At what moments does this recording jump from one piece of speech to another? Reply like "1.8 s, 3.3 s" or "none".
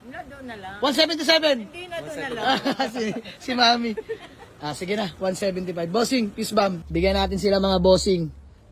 6.8 s